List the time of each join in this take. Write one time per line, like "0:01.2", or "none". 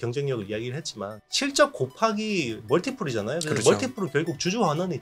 0:01.2